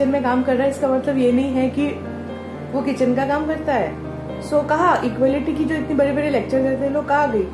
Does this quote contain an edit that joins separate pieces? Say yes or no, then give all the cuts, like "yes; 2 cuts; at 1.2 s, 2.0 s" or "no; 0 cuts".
no; 0 cuts